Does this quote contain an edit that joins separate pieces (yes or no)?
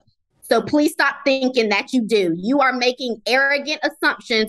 no